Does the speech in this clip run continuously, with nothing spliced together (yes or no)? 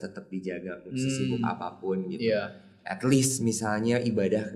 yes